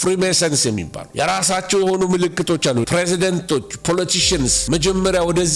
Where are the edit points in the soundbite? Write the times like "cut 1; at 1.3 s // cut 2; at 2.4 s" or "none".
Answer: cut 1; at 1.0 s // cut 2; at 2.9 s